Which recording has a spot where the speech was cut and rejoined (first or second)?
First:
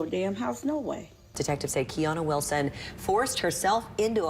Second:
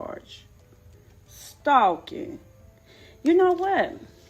first